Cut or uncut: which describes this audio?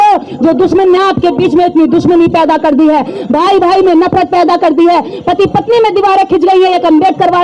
uncut